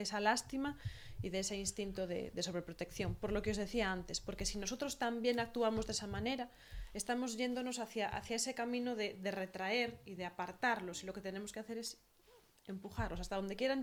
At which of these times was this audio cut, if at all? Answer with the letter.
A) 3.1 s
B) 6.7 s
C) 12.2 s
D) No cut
D